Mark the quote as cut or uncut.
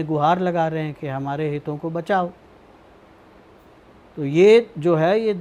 uncut